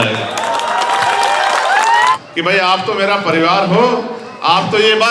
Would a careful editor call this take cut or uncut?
cut